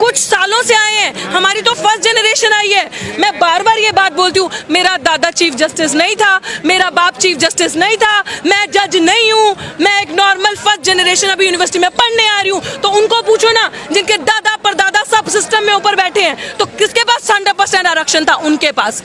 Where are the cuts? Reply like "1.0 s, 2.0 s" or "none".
none